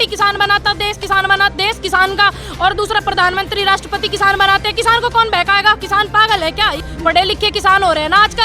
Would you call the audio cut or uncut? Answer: cut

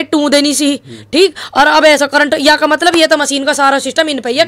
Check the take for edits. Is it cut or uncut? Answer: uncut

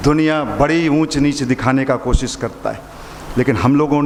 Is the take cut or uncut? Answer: uncut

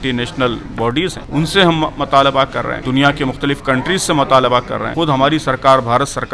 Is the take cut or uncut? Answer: cut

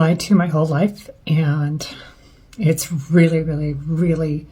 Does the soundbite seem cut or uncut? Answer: uncut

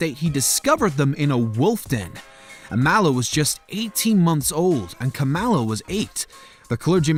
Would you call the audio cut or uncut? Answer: uncut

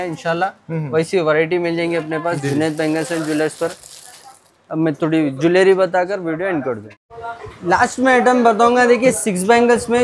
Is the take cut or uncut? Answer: uncut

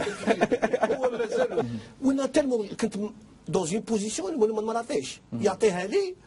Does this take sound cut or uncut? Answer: uncut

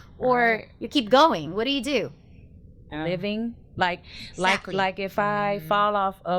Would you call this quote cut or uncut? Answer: cut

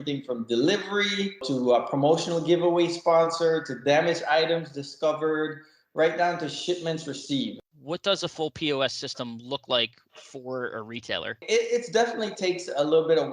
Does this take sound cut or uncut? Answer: cut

